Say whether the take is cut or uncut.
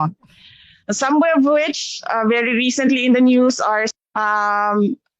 cut